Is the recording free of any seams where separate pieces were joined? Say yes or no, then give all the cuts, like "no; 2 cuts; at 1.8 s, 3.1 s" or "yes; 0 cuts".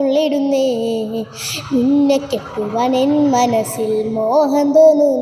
yes; 0 cuts